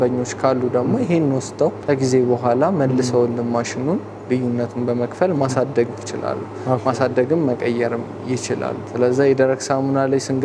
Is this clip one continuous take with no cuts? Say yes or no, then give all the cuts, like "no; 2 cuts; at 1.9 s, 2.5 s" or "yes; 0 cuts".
yes; 0 cuts